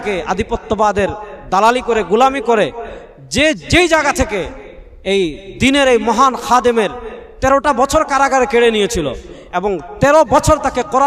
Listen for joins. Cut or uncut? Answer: uncut